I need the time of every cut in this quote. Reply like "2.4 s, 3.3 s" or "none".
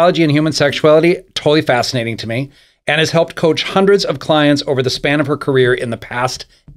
none

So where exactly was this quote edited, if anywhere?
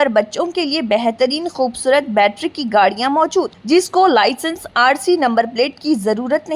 none

